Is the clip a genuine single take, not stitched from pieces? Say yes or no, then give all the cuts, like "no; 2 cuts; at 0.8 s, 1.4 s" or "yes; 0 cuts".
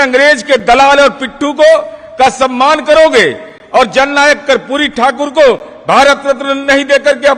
yes; 0 cuts